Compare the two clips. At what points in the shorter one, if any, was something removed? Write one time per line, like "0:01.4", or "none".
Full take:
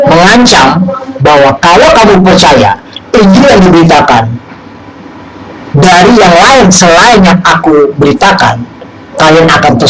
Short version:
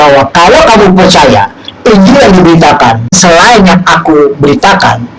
0:03.2